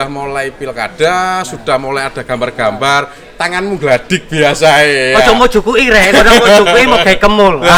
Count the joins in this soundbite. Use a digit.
0